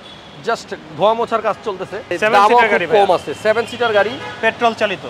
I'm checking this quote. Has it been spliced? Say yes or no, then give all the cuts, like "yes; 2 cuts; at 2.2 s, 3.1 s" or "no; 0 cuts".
yes; 1 cut; at 2.0 s